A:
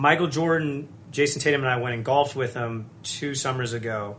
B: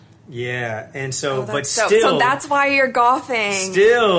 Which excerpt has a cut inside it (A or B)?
A